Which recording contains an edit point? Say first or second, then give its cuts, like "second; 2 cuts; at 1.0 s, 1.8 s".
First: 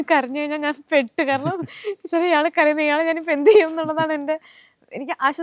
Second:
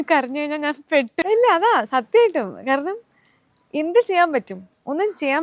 second; 1 cut; at 1.2 s